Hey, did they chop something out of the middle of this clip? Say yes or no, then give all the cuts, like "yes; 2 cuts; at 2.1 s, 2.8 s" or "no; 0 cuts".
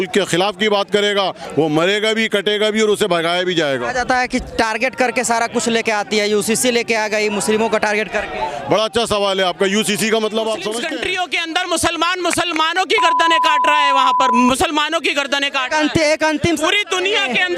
yes; 1 cut; at 10.9 s